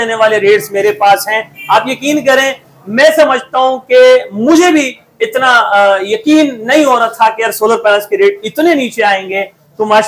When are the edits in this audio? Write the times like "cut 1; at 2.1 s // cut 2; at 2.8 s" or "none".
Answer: none

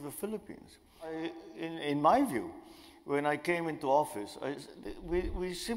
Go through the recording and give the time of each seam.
cut 1; at 1.2 s

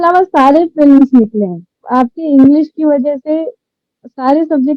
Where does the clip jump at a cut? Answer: cut 1; at 1.8 s

